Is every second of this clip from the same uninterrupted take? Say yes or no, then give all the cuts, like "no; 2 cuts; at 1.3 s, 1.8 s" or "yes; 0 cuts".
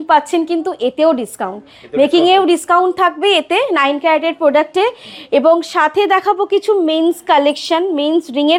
yes; 0 cuts